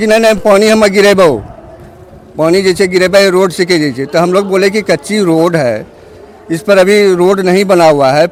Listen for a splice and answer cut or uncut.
uncut